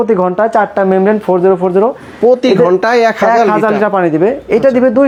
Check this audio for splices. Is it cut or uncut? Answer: uncut